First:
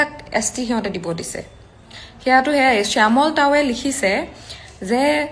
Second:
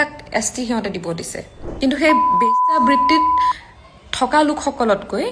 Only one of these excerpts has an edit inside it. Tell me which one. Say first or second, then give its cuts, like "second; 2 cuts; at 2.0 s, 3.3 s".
second; 1 cut; at 1.6 s